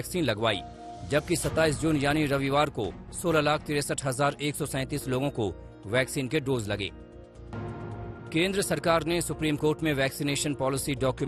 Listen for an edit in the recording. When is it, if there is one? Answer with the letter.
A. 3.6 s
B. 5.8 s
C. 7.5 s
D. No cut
C